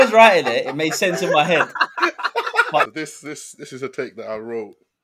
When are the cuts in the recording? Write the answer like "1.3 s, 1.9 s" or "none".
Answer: 2.9 s